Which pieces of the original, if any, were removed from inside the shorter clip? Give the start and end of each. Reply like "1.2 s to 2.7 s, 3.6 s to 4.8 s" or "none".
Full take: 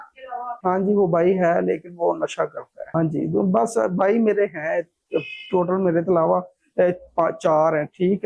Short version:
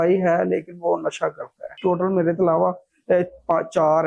2.8 s to 5.3 s